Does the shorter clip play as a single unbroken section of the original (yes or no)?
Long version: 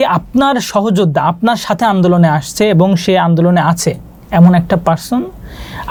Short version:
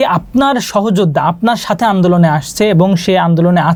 yes